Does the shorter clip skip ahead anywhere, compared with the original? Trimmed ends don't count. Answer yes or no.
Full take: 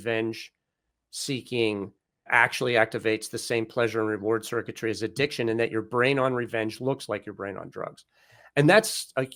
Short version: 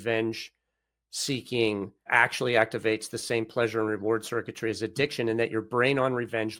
yes